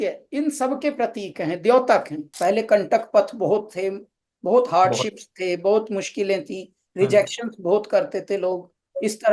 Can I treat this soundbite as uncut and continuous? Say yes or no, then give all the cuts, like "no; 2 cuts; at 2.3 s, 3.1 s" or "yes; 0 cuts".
no; 1 cut; at 2.2 s